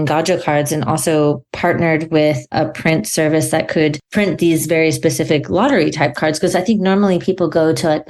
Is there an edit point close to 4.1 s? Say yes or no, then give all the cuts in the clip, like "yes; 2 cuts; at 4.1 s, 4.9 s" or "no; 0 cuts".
no; 0 cuts